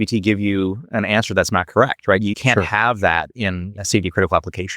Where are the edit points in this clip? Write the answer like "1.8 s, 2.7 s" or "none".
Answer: 2.3 s, 3.8 s